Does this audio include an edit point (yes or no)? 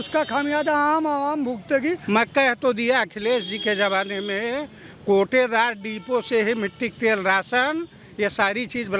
yes